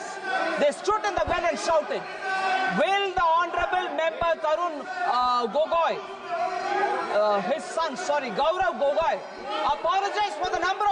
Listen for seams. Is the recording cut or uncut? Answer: uncut